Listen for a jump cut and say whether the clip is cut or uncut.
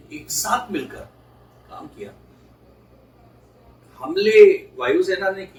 uncut